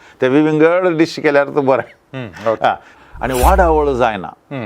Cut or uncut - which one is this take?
cut